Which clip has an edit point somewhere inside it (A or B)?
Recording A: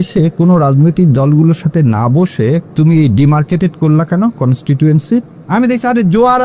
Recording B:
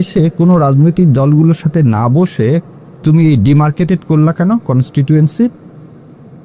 A